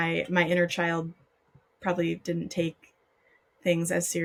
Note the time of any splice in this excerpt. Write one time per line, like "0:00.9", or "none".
none